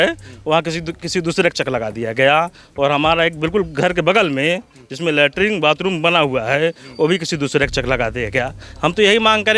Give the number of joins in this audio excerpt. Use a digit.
0